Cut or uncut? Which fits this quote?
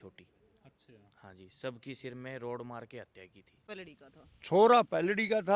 cut